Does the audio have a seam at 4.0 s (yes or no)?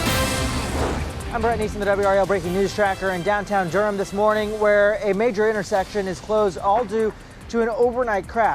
no